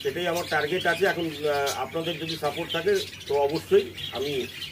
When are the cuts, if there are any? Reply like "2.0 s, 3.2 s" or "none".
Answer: none